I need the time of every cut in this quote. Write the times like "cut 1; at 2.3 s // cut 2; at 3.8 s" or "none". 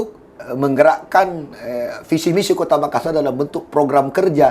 none